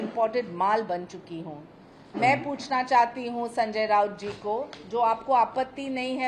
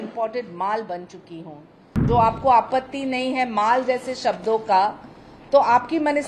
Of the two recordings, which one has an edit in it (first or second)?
second